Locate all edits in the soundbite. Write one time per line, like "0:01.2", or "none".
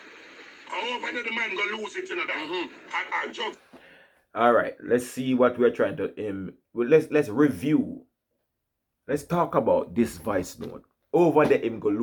none